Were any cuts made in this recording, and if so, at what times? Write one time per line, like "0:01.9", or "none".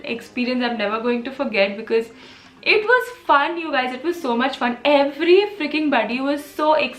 none